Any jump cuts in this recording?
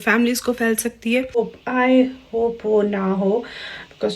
yes; 1 cut; at 1.4 s

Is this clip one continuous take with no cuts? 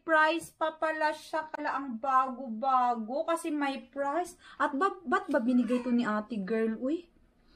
yes; 0 cuts

